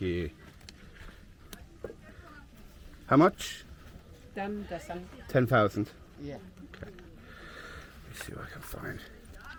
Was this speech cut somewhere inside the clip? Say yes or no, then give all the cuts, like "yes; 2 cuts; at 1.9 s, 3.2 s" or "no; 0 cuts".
no; 0 cuts